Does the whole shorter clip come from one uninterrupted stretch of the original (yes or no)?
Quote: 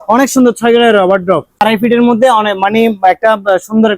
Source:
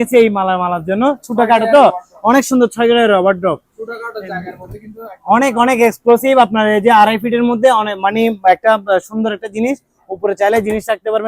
no